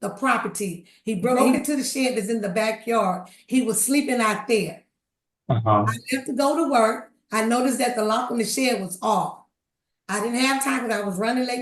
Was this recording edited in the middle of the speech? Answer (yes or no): yes